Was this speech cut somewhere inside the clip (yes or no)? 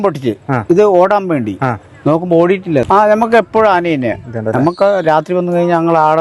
yes